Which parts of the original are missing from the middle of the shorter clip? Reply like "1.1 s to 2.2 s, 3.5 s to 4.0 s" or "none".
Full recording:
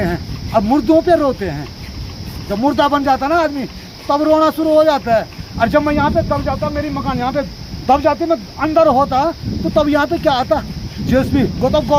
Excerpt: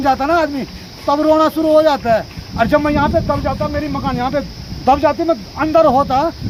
none